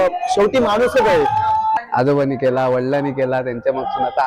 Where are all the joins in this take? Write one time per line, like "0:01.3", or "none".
0:01.8